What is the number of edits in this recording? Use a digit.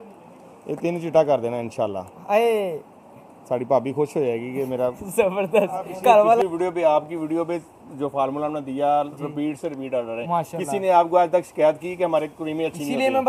1